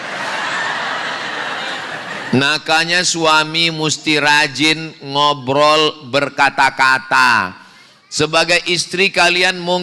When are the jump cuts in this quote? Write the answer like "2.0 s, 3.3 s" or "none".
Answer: none